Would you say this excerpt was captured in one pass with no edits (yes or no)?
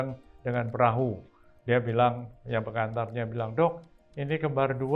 yes